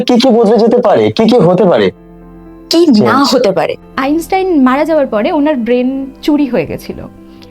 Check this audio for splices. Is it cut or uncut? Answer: cut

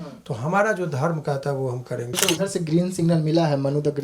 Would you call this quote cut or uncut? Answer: cut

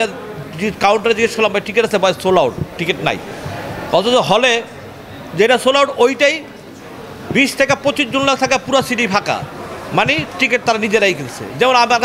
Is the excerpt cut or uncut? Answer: uncut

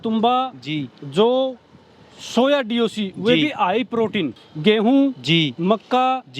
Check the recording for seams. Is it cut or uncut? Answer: cut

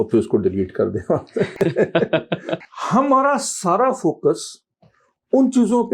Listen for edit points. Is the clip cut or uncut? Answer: cut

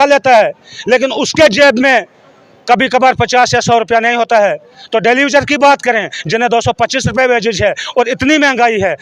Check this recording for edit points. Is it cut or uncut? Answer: uncut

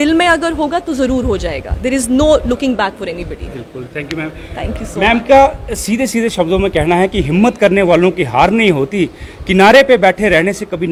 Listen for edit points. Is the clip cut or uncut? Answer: uncut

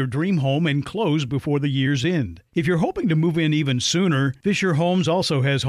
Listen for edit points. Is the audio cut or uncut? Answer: uncut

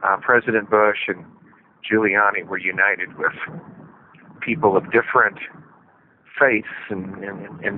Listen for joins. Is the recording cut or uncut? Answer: uncut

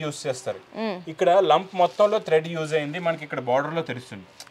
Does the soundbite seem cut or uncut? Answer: uncut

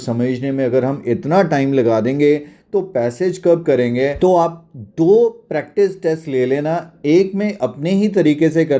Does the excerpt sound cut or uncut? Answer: cut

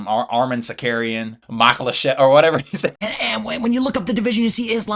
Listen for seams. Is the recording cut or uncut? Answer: cut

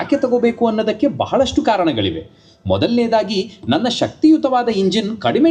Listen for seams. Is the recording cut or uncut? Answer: uncut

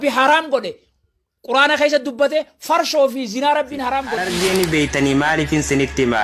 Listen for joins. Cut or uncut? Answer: cut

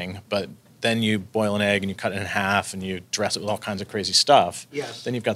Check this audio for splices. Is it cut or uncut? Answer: uncut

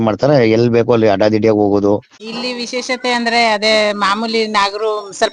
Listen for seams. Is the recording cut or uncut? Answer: cut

